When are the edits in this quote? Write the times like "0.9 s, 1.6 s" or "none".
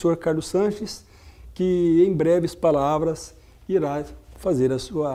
none